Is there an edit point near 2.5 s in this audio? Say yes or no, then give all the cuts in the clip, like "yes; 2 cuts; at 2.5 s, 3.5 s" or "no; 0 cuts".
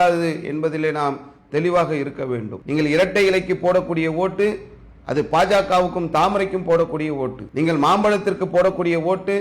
yes; 2 cuts; at 2.5 s, 7.4 s